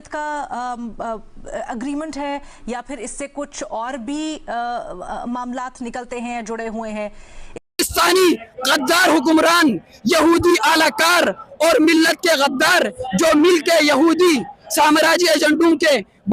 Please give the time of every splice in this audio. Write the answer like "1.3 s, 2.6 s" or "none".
7.6 s